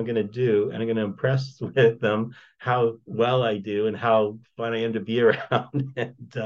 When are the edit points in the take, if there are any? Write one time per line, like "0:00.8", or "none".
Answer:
0:02.8
0:04.5